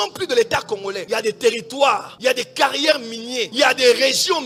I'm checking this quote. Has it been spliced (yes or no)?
no